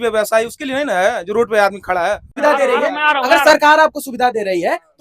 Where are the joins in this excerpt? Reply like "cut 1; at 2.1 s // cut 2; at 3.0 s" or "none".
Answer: cut 1; at 2.3 s